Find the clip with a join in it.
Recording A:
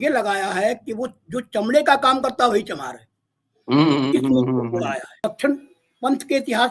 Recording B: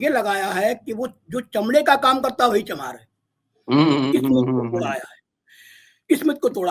A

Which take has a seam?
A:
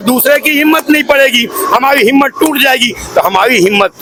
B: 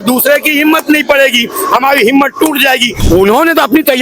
B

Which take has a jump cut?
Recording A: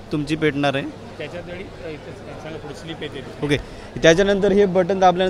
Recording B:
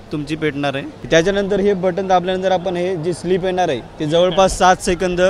B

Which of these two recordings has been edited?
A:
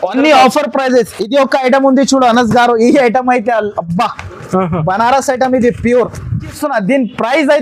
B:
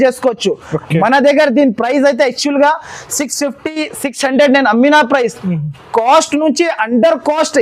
A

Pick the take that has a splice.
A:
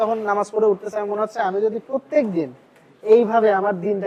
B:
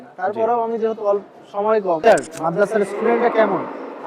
B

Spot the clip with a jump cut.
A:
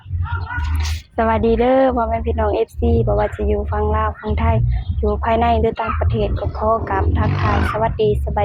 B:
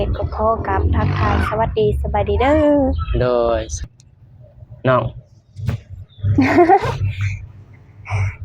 B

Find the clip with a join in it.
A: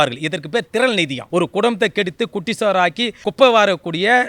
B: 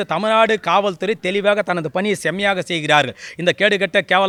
A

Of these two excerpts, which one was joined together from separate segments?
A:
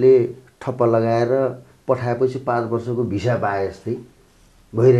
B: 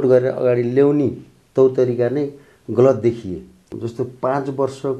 B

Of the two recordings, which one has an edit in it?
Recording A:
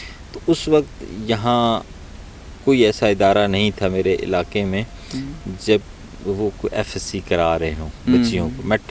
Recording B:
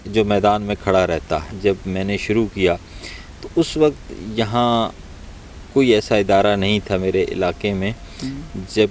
B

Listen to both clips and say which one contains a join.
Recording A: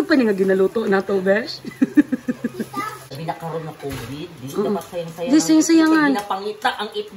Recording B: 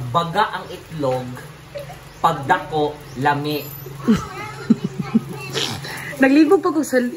A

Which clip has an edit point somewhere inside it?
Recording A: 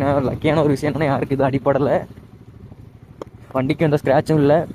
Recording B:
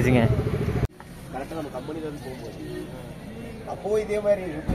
B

